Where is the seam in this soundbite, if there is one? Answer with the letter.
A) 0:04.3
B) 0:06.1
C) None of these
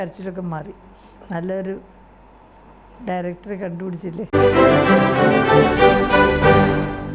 A